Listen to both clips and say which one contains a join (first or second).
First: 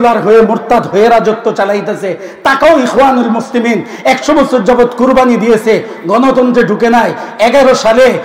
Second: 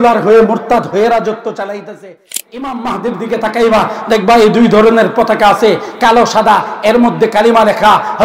second